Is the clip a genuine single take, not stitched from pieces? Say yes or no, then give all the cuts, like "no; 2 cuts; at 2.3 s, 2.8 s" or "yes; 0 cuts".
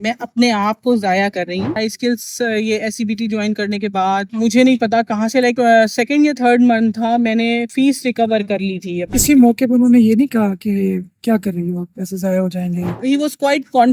no; 3 cuts; at 1.8 s, 9.1 s, 13.0 s